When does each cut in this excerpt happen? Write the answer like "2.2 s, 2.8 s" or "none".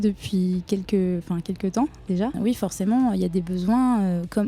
2.4 s